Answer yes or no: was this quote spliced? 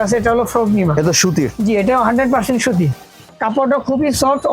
yes